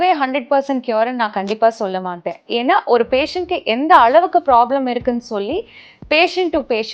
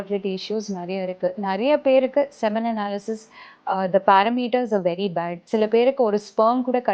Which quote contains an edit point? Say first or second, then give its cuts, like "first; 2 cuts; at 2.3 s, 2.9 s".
second; 1 cut; at 5.4 s